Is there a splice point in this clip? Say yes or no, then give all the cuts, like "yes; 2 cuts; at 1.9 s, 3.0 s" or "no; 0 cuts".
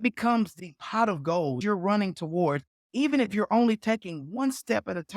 yes; 1 cut; at 1.6 s